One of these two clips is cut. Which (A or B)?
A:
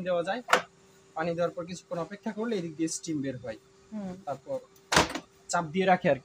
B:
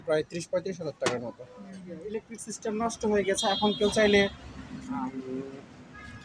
B